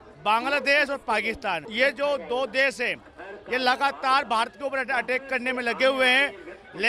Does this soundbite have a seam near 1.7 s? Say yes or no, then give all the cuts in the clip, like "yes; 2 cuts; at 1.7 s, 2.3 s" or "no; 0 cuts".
yes; 1 cut; at 1.7 s